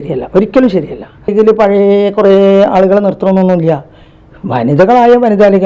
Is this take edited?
yes; 1 cut; at 1.3 s

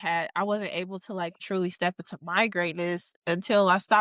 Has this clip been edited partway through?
yes; 1 cut; at 1.4 s

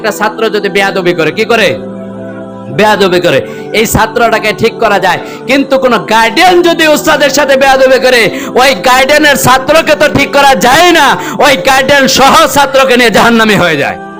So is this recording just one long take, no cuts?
yes; 0 cuts

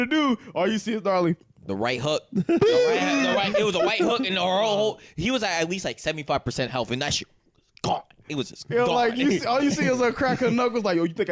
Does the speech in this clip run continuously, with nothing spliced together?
yes; 0 cuts

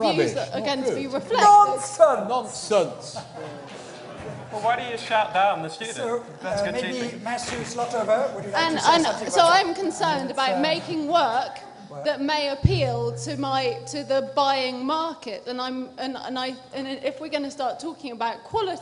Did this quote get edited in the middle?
no; 0 cuts

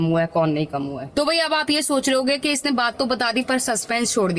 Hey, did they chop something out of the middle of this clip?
no; 0 cuts

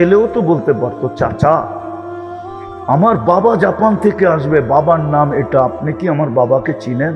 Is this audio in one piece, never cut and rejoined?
yes; 0 cuts

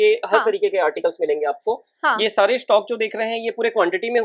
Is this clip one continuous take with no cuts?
yes; 0 cuts

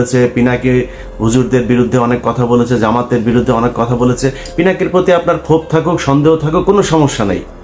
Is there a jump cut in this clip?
no; 0 cuts

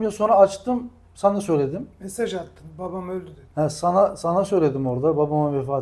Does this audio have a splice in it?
no; 0 cuts

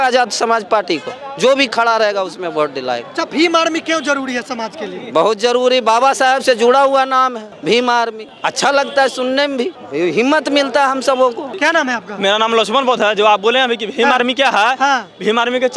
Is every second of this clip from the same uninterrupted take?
yes; 0 cuts

